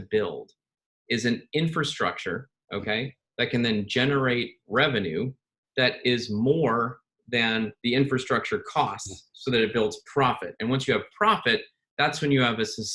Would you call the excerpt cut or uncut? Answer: uncut